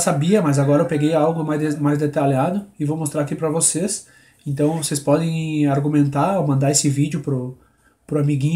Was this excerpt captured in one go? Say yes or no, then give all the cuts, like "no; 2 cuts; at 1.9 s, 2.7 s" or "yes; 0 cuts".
yes; 0 cuts